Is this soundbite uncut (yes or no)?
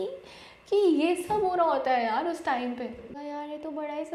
no